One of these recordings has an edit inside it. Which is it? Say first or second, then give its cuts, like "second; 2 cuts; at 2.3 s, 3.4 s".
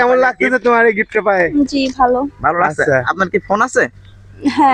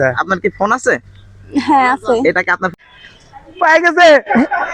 second; 1 cut; at 2.7 s